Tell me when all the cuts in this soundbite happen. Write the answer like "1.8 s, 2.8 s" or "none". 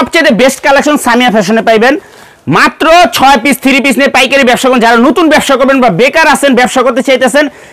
none